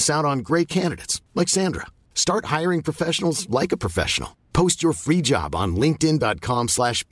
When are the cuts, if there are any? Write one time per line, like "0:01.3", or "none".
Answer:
none